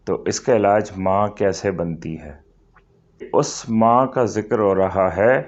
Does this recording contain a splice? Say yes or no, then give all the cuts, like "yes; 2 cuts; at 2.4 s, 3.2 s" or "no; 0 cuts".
yes; 1 cut; at 3.3 s